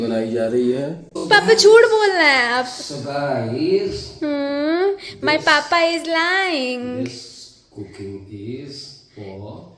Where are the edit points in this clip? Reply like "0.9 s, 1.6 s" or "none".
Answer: 1.1 s